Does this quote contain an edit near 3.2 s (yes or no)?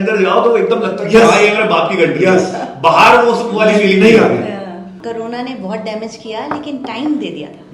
no